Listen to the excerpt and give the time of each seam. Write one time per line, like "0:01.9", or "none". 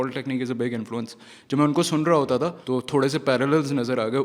0:02.6